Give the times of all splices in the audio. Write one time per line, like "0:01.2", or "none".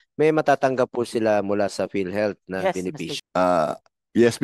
0:03.0